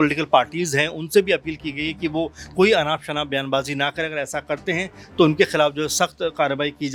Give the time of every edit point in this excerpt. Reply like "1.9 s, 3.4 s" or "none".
none